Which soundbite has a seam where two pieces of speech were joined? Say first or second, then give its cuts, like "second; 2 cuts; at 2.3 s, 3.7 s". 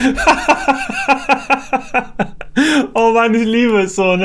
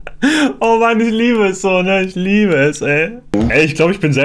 second; 1 cut; at 3.3 s